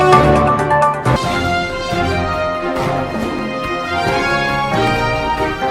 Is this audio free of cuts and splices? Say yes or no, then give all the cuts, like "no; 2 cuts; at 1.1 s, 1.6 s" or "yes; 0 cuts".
no; 1 cut; at 1.1 s